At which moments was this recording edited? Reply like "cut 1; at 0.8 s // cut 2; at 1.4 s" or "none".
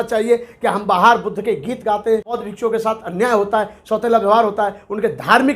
cut 1; at 2.4 s